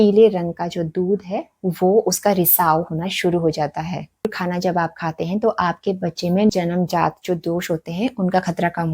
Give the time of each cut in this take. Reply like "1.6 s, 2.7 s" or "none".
4.3 s, 6.5 s